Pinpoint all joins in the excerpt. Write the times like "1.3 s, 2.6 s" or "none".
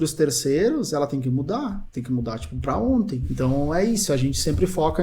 1.9 s, 3.2 s